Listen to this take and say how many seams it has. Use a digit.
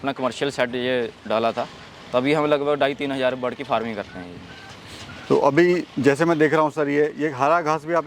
0